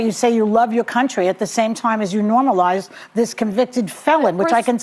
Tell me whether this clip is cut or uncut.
uncut